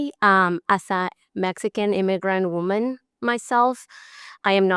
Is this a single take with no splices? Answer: yes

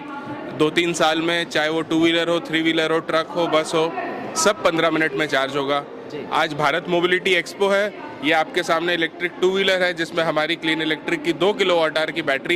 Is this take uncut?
yes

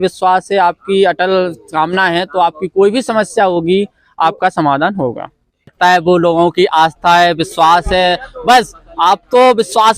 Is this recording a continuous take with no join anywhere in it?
no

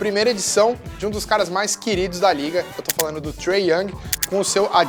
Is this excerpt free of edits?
yes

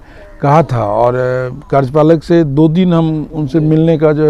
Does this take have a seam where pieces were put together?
no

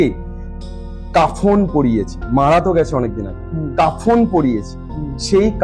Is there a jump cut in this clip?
no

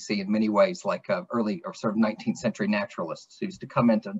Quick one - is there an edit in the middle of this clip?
no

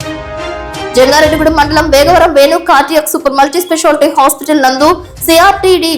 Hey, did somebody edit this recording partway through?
no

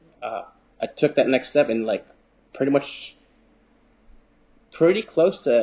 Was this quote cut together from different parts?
no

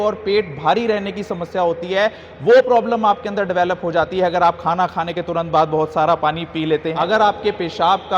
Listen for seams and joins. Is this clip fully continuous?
no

